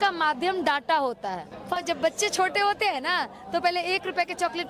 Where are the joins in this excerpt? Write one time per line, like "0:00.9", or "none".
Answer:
0:01.8